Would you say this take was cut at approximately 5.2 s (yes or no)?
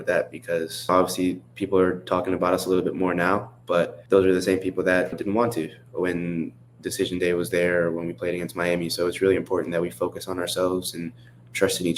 yes